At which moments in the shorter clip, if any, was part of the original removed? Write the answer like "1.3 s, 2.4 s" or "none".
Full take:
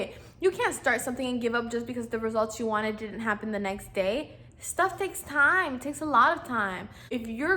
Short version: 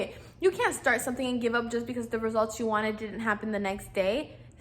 none